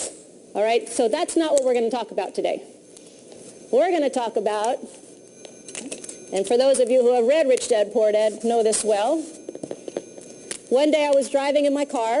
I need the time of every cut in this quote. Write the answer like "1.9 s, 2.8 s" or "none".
none